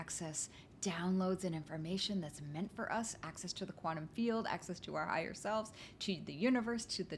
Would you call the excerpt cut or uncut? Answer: uncut